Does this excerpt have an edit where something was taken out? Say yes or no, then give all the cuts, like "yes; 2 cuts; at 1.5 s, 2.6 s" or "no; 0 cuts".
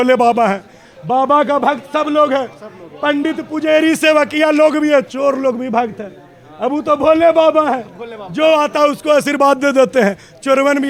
no; 0 cuts